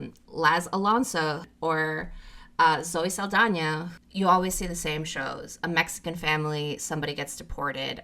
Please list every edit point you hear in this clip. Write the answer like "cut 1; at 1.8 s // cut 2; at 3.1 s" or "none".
cut 1; at 1.4 s // cut 2; at 3.9 s